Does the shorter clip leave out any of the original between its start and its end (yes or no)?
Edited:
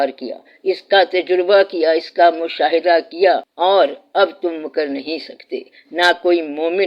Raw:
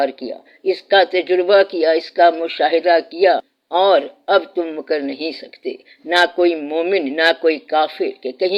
yes